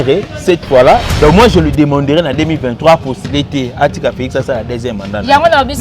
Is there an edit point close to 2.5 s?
no; 1 cut; at 1.0 s

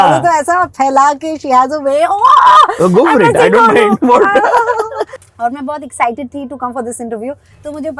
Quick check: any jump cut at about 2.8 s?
no; 1 cut; at 5.2 s

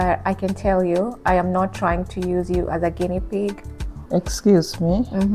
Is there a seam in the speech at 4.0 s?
yes; 1 cut; at 4.0 s

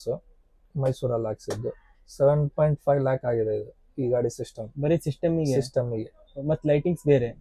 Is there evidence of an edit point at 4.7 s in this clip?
no; 0 cuts

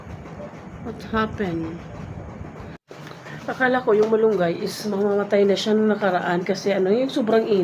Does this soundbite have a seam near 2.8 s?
yes; 1 cut; at 2.8 s

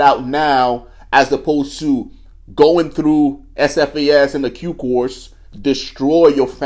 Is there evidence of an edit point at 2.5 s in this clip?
no; 0 cuts

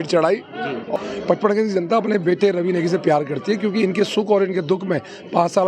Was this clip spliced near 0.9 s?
yes; 1 cut; at 0.9 s

